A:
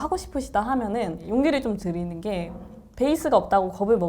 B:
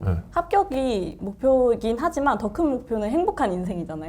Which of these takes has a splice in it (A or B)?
A